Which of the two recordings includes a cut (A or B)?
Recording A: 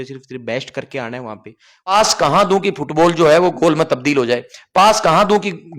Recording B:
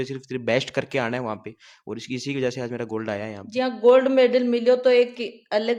A